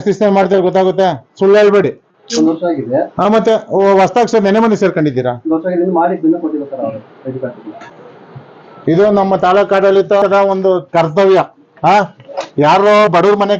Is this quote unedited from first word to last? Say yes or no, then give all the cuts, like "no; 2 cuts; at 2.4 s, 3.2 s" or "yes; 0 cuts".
yes; 0 cuts